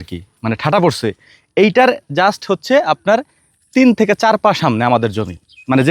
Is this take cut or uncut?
uncut